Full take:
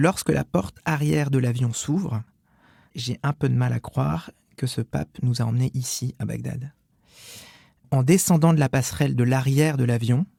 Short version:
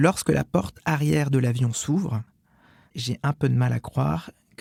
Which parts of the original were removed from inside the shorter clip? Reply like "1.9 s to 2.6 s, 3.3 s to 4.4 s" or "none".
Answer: none